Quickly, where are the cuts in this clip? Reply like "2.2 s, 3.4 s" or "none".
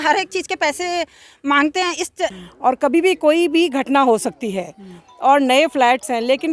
2.4 s